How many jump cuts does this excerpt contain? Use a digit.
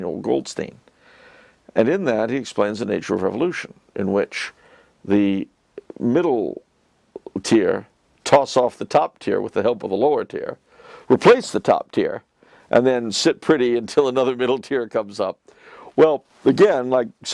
0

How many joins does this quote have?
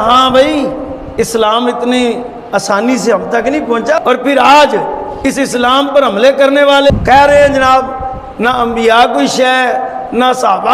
2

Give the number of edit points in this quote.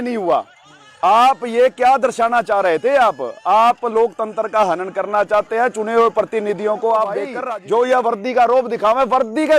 1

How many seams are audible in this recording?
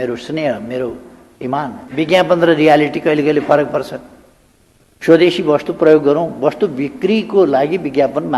1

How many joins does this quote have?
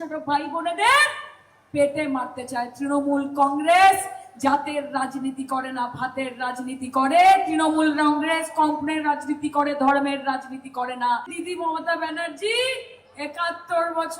1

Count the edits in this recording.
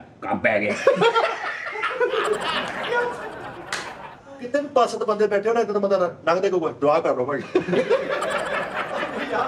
1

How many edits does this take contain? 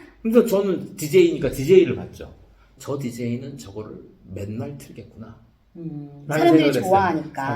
1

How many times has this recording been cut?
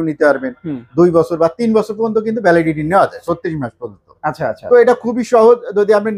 0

